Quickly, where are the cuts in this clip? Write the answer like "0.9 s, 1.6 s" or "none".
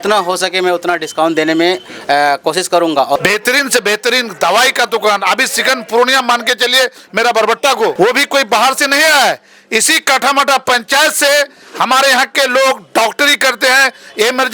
3.2 s, 7.9 s